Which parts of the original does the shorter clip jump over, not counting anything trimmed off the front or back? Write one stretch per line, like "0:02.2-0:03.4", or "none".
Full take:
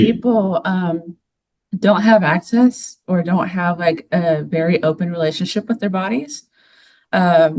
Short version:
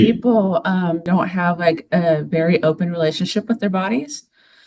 0:01.1-0:03.3